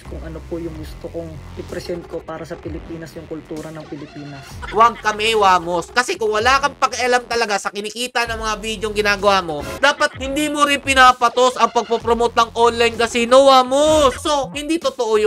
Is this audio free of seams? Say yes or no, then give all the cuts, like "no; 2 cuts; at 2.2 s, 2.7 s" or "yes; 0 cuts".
no; 4 cuts; at 1.5 s, 4.6 s, 9.7 s, 14.2 s